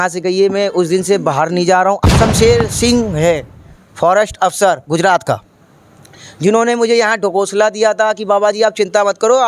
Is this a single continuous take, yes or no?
no